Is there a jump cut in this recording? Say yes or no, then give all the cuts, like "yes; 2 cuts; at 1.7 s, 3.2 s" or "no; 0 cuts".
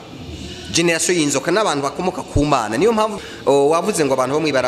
yes; 1 cut; at 3.2 s